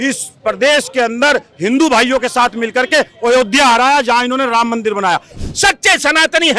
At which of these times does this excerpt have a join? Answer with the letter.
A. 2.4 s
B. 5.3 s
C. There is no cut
B